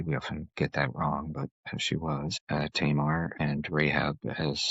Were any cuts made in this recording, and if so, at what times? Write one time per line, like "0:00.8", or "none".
0:02.4
0:03.3